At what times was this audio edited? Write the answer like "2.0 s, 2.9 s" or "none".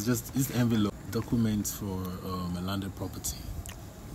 0.9 s

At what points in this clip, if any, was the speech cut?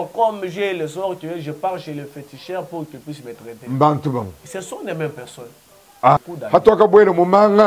6.2 s

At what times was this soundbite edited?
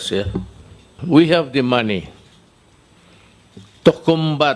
1.0 s

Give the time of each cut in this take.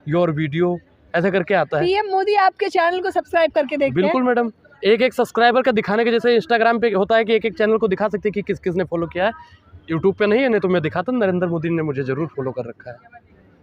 none

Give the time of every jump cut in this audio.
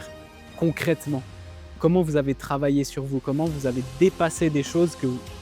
none

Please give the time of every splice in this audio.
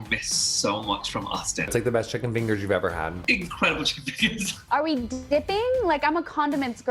1.7 s, 3.2 s, 4.5 s

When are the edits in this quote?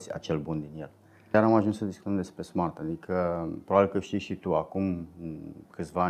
1.2 s

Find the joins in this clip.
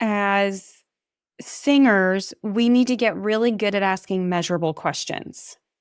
none

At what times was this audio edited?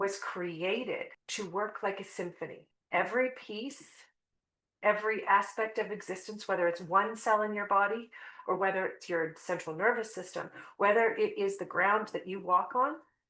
1.2 s, 2.7 s

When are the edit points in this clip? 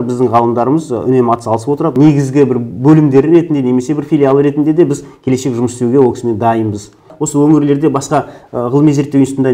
1.9 s, 7.1 s

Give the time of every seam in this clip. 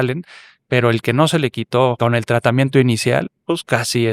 2.0 s

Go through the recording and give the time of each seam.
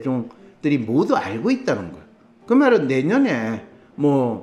none

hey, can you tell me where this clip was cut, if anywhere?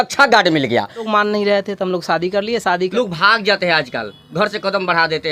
1.1 s, 2.9 s

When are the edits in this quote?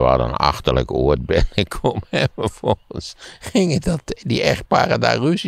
none

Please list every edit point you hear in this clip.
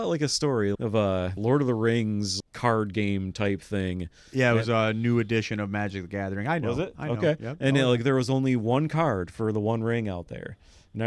1.3 s, 2.3 s

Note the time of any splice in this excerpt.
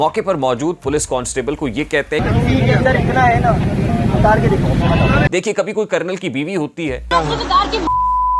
2.2 s, 5.3 s

